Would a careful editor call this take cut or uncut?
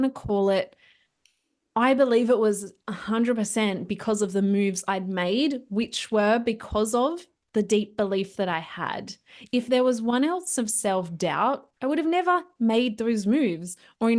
cut